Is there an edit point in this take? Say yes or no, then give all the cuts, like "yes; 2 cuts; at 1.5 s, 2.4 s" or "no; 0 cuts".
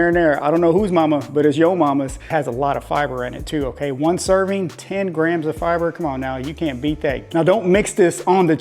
yes; 2 cuts; at 2.2 s, 7.2 s